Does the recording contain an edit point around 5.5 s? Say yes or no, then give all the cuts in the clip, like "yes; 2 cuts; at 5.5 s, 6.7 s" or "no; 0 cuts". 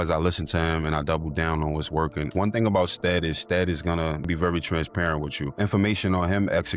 yes; 3 cuts; at 2.3 s, 4.3 s, 5.5 s